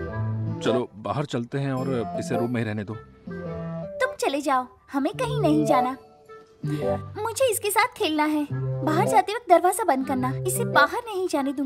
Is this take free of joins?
yes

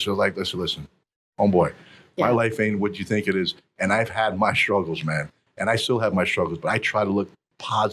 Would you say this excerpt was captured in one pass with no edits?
yes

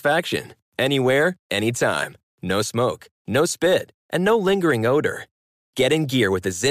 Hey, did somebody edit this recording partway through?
no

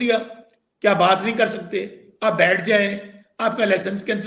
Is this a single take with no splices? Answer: yes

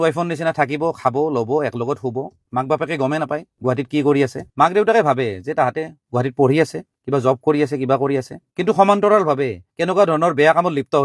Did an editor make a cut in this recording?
no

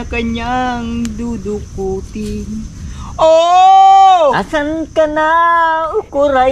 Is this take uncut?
no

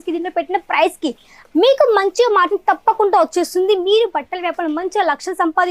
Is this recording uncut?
yes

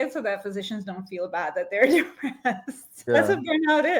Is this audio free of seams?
no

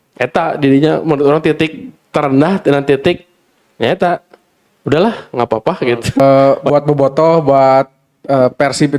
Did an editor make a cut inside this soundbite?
yes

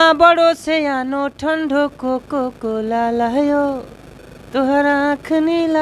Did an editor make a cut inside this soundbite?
no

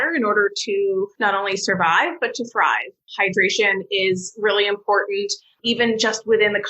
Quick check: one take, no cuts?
no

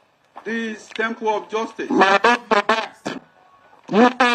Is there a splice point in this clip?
no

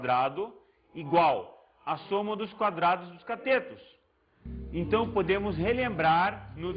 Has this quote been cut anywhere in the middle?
no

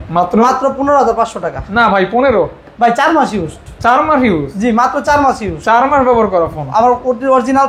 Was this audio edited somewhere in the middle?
no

